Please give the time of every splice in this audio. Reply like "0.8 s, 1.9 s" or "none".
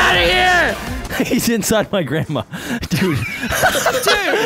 0.9 s